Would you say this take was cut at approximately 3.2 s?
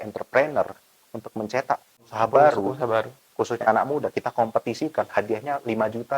no; 1 cut; at 2.0 s

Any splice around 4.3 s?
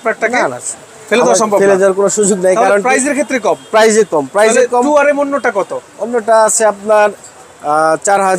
no; 0 cuts

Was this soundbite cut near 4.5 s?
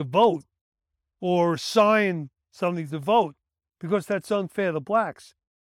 no; 0 cuts

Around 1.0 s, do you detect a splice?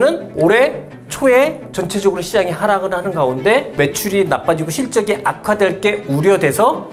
no; 0 cuts

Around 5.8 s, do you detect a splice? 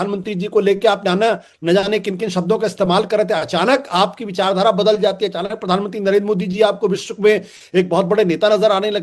yes; 1 cut; at 5.8 s

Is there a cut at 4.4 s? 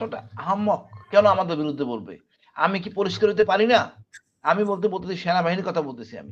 no; 0 cuts

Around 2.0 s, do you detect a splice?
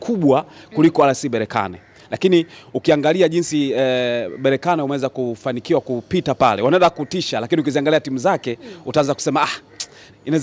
no; 0 cuts

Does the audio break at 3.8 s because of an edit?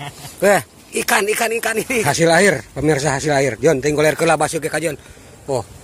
no; 1 cut; at 2.2 s

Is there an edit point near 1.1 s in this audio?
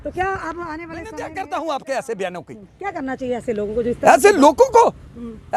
yes; 1 cut; at 1.1 s

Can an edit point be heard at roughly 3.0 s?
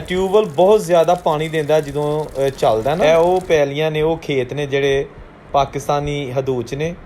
yes; 1 cut; at 3.0 s

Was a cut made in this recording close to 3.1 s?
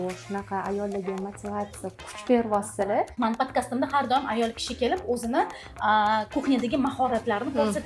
yes; 1 cut; at 3.1 s

